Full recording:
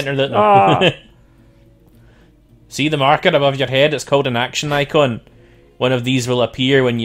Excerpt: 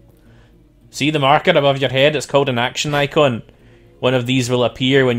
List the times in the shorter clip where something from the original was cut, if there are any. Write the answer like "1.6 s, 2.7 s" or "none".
0.9 s